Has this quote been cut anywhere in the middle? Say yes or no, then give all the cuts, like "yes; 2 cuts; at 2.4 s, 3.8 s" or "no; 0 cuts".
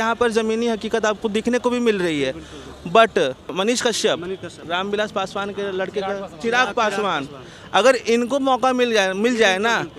yes; 2 cuts; at 3.5 s, 4.6 s